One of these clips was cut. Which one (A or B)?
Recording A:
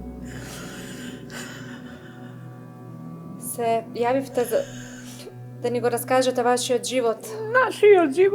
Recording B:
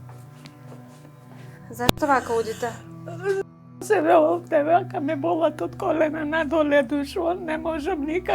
B